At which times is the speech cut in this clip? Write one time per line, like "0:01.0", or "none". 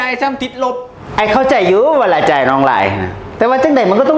none